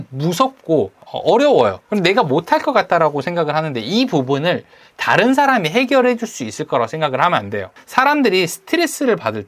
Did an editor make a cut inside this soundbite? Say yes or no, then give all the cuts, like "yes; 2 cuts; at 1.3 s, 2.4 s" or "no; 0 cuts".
no; 0 cuts